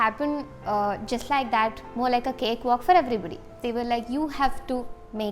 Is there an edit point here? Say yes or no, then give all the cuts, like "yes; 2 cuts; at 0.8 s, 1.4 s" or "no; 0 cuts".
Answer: yes; 1 cut; at 3.5 s